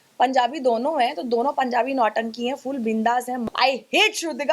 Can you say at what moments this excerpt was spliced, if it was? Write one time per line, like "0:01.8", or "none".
0:03.4